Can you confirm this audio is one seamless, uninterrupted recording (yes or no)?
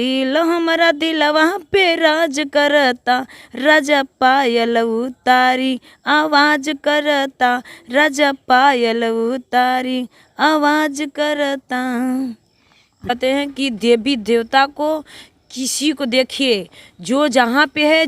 no